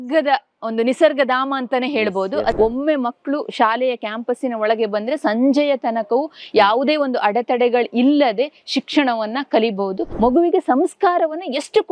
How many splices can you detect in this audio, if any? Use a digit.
2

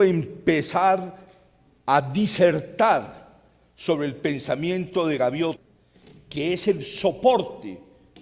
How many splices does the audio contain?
0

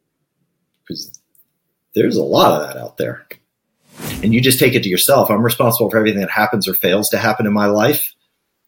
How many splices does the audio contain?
1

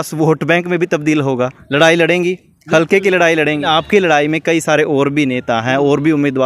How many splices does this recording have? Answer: 2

